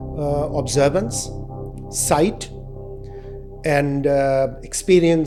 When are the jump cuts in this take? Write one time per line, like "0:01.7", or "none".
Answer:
none